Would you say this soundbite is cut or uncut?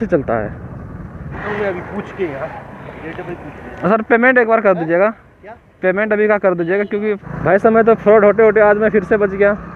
cut